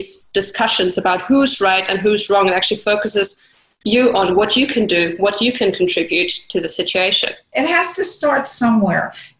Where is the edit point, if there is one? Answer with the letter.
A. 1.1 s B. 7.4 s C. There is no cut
B